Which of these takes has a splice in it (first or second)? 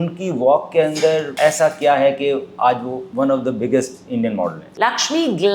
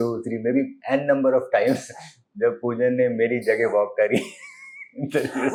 first